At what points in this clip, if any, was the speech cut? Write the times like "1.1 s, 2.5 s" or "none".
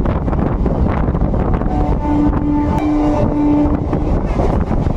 2.8 s

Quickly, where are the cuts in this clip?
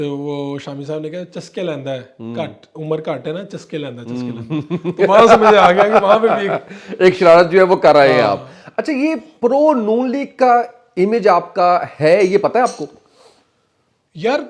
none

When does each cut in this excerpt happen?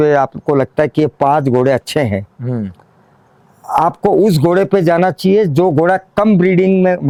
none

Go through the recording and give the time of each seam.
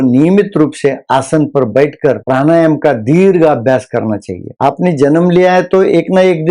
4.5 s

